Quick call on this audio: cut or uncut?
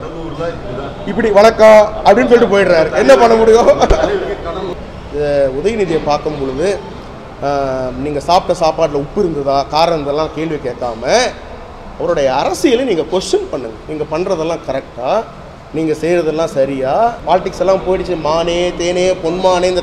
cut